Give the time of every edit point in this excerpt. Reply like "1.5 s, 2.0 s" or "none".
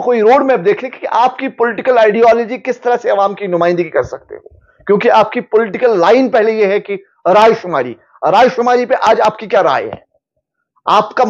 none